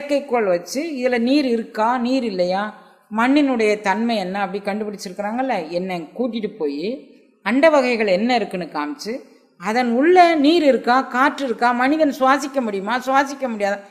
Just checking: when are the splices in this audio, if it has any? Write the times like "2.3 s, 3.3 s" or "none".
none